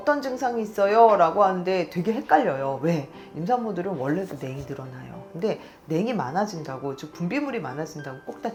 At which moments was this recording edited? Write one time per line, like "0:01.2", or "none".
none

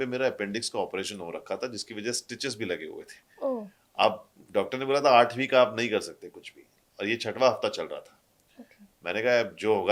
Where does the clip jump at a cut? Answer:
none

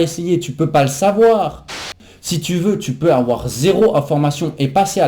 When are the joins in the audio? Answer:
0:02.0

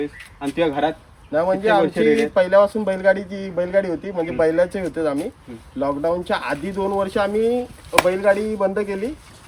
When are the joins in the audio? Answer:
none

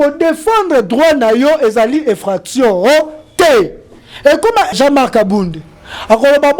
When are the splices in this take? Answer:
0:04.7

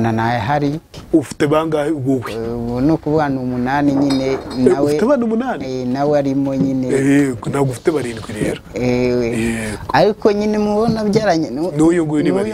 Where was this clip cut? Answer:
0:00.9

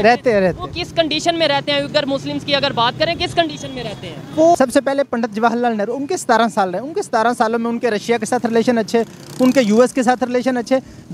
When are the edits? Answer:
0:04.5

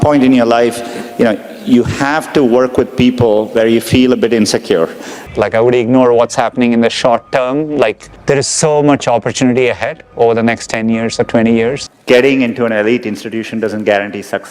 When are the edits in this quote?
0:05.2
0:11.9

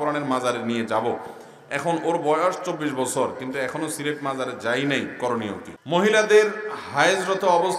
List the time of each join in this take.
0:05.7

